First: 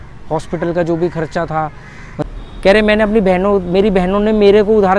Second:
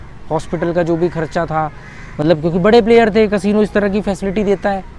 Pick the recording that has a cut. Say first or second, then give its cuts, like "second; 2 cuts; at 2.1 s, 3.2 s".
first; 1 cut; at 2.2 s